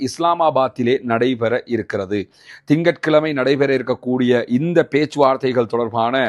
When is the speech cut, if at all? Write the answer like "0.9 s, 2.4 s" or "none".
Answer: none